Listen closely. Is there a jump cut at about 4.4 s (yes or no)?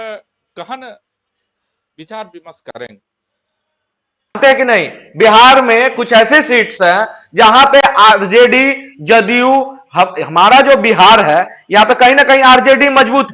yes